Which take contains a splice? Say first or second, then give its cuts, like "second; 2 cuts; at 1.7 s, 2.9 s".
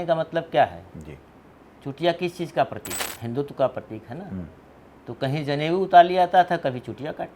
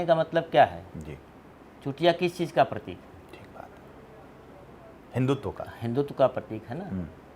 first; 1 cut; at 3.1 s